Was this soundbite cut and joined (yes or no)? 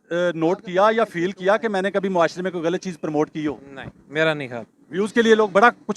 no